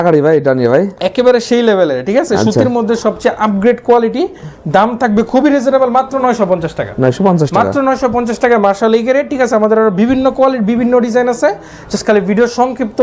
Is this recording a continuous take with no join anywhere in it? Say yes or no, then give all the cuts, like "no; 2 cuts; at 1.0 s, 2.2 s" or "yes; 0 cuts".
yes; 0 cuts